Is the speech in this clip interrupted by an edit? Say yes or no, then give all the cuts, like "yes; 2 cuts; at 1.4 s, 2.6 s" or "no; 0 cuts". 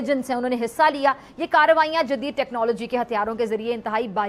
no; 0 cuts